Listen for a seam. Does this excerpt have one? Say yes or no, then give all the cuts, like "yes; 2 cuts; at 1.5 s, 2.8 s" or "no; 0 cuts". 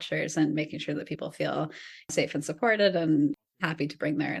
yes; 2 cuts; at 2.1 s, 3.3 s